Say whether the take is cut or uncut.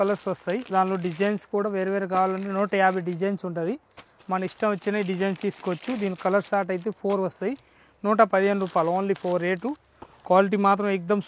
uncut